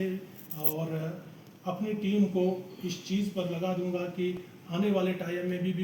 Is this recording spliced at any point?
no; 0 cuts

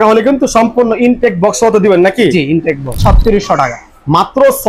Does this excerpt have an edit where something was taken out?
yes; 1 cut; at 3.0 s

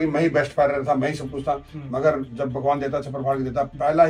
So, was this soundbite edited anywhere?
no; 0 cuts

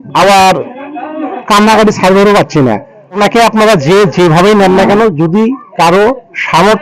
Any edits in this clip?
yes; 1 cut; at 3.0 s

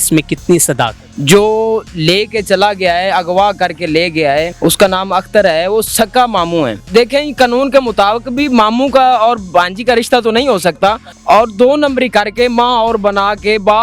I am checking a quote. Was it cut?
yes; 4 cuts; at 1.1 s, 4.5 s, 6.8 s, 11.1 s

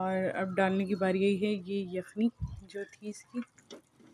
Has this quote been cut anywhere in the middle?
no; 0 cuts

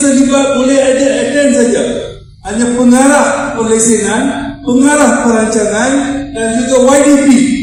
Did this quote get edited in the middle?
no; 0 cuts

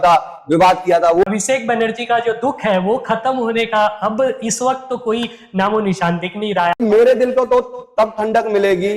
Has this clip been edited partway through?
yes; 2 cuts; at 1.2 s, 6.8 s

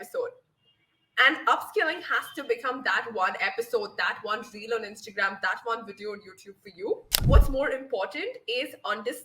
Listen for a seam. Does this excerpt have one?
yes; 1 cut; at 7.1 s

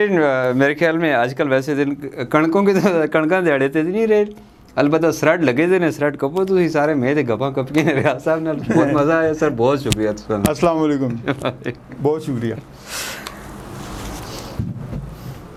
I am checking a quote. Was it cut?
no; 0 cuts

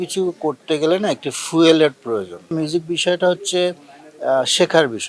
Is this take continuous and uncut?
no; 1 cut; at 2.5 s

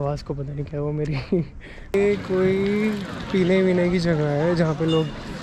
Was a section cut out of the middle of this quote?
yes; 1 cut; at 1.9 s

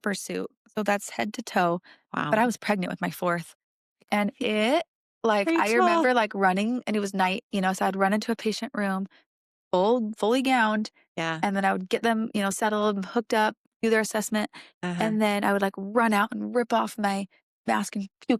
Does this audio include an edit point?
no; 0 cuts

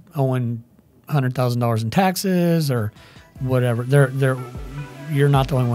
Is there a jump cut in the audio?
no; 0 cuts

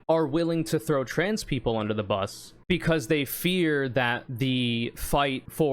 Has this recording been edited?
no; 0 cuts

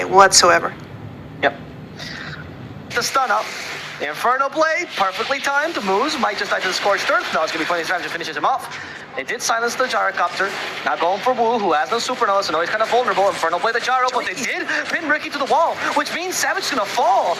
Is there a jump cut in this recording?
yes; 1 cut; at 2.9 s

